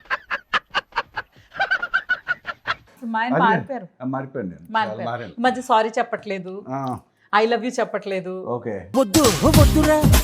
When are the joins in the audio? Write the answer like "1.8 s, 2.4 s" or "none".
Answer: 3.0 s